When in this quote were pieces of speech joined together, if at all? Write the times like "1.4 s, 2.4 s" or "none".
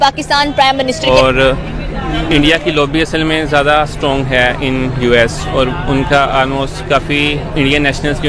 1.1 s